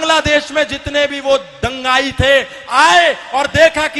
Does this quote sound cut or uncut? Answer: uncut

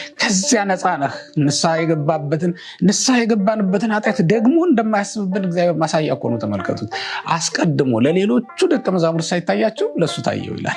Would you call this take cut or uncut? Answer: uncut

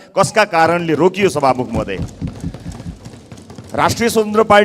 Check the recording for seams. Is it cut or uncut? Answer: uncut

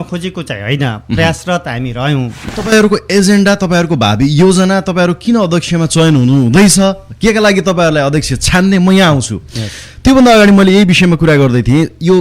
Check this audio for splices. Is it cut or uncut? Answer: cut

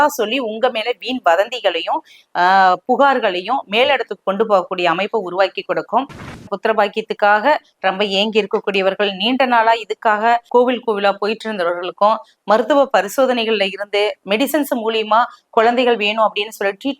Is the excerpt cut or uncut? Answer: cut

